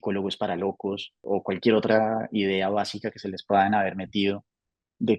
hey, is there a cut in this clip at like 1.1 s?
yes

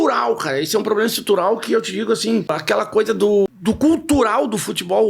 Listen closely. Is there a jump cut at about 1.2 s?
no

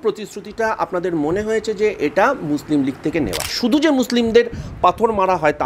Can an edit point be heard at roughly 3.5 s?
yes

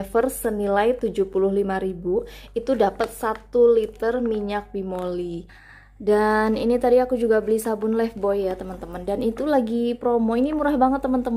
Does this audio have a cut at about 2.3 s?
no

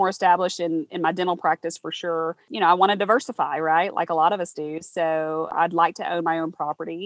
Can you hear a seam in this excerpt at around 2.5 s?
yes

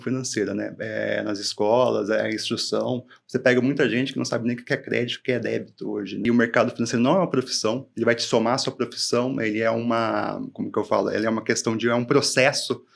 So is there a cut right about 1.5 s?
no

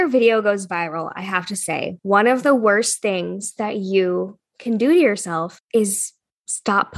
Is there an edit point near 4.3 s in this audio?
no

